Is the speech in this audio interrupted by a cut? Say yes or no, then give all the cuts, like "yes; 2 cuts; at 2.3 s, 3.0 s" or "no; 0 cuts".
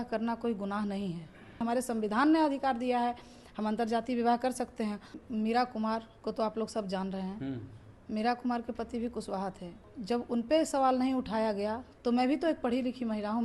yes; 4 cuts; at 1.6 s, 5.1 s, 9.9 s, 11.9 s